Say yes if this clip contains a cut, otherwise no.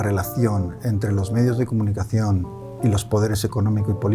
no